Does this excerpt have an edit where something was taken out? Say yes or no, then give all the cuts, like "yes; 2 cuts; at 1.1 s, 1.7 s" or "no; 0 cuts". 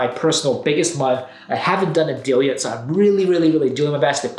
no; 0 cuts